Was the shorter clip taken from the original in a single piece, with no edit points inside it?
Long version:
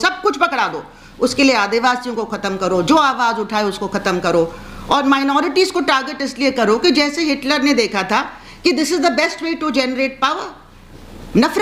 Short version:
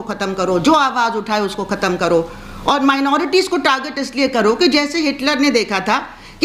yes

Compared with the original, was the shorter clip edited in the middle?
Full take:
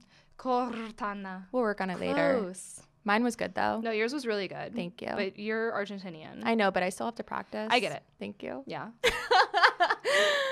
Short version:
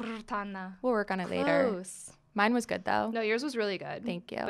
no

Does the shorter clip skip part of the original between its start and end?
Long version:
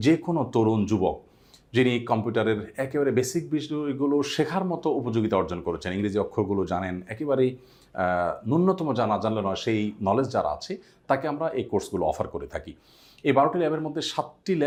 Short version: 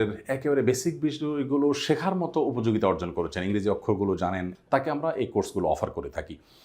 yes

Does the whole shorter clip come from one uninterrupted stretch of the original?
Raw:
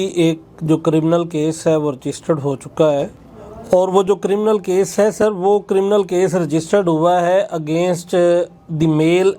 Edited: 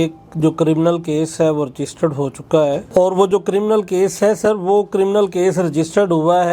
no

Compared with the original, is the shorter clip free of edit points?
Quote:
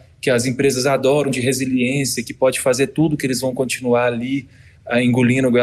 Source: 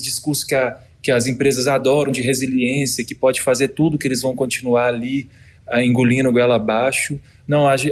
yes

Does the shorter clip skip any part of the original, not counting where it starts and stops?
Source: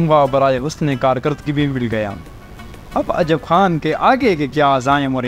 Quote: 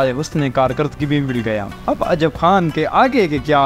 yes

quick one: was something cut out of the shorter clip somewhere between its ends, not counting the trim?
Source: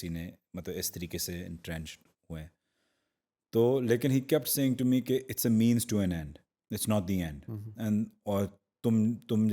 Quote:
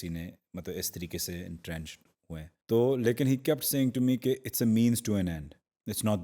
yes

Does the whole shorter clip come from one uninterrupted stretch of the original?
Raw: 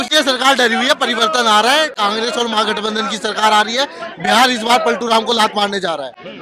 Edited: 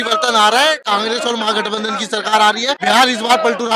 no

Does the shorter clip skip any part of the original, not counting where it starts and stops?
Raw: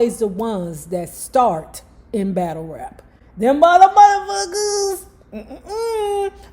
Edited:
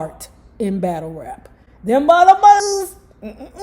yes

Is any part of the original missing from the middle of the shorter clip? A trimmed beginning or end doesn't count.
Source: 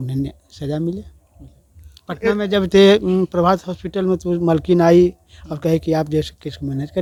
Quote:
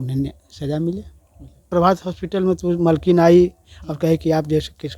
yes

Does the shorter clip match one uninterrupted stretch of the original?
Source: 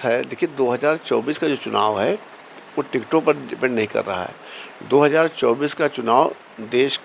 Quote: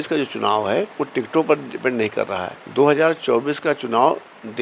no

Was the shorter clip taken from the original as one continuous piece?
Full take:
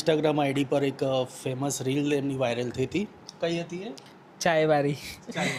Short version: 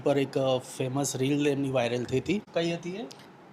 no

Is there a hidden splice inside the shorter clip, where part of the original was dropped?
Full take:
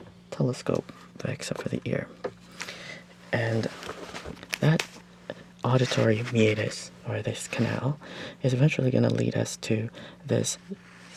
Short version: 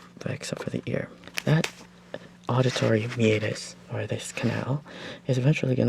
yes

